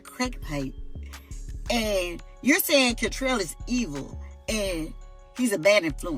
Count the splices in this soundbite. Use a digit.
0